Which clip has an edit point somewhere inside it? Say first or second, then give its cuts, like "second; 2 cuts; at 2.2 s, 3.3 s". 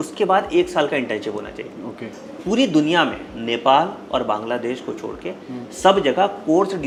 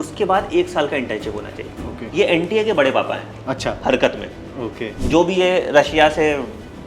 second; 2 cuts; at 2.0 s, 4.9 s